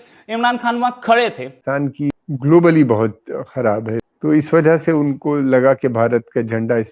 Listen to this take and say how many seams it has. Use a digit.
2